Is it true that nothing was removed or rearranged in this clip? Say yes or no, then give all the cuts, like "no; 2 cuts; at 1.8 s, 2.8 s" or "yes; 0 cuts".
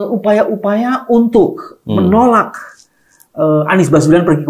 yes; 0 cuts